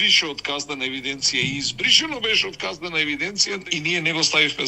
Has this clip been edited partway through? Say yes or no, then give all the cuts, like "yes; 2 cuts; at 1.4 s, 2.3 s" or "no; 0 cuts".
yes; 1 cut; at 3.6 s